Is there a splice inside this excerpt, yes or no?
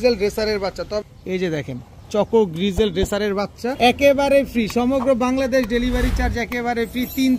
yes